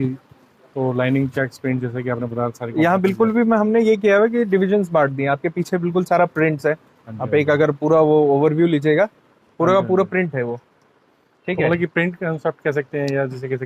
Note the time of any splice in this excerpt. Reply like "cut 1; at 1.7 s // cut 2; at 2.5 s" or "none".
none